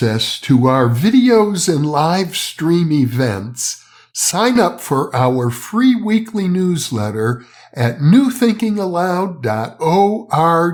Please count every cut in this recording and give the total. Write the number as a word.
zero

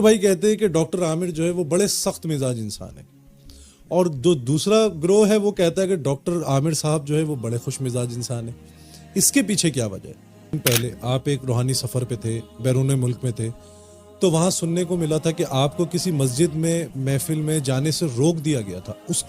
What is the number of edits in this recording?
one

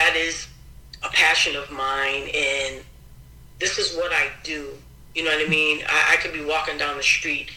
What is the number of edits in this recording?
zero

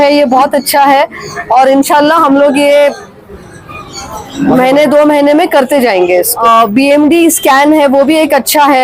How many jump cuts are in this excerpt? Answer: one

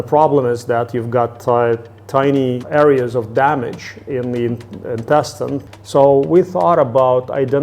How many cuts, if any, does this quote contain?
two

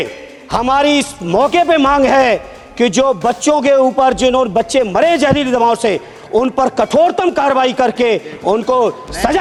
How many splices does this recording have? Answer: zero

